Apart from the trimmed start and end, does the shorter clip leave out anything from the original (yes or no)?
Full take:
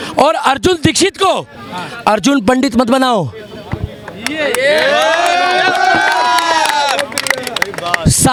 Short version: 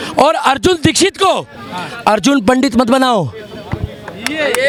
no